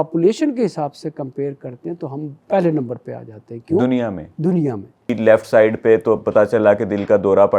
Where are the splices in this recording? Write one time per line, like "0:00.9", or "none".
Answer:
0:02.4
0:05.1